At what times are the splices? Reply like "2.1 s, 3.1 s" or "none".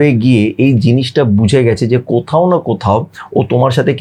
none

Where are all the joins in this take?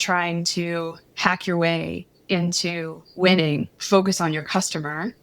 1.0 s, 3.7 s

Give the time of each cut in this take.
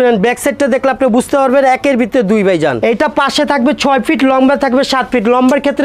2.8 s

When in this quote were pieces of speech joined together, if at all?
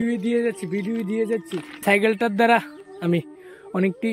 1.8 s

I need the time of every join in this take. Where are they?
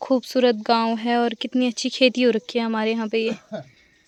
none

